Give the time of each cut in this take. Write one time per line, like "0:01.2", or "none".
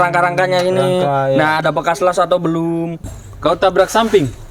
0:03.1

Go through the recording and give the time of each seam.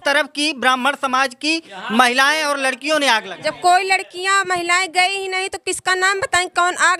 none

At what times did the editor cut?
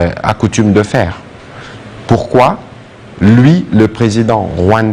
none

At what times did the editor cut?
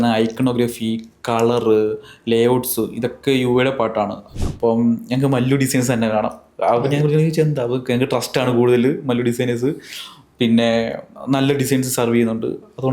0:04.3

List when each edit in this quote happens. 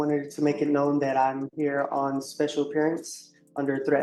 none

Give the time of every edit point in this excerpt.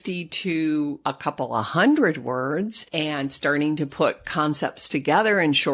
0:01.0
0:02.8

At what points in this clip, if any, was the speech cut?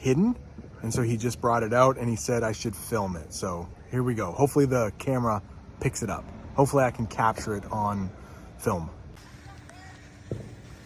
none

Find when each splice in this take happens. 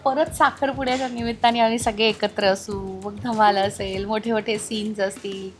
none

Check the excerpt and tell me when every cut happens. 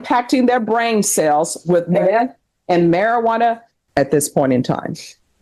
0:03.7

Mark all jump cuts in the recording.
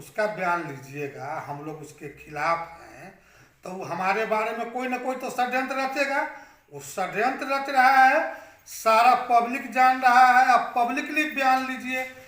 none

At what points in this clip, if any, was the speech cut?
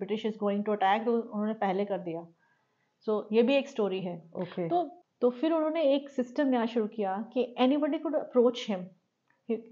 0:04.9

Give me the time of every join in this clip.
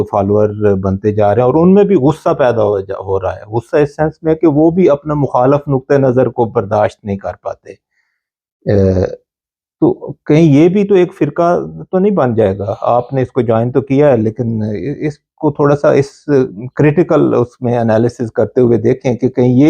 none

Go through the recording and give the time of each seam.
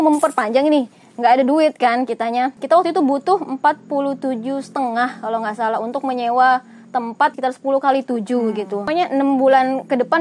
0:02.6
0:07.4
0:08.9

